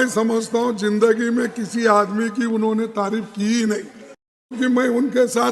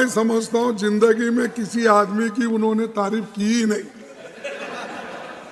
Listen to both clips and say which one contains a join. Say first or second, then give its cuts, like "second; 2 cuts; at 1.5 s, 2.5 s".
first; 1 cut; at 4.5 s